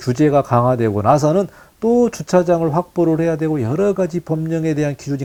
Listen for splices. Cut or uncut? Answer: uncut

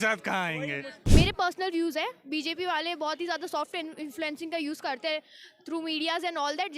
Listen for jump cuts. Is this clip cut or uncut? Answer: cut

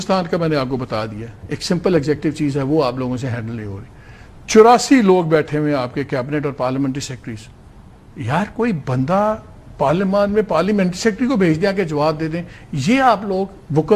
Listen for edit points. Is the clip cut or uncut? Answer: uncut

